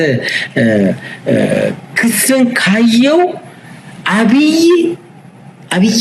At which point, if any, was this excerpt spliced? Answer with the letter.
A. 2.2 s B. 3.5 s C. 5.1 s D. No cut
D